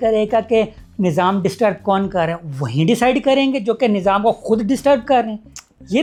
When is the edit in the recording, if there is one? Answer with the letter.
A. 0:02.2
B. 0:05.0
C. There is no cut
C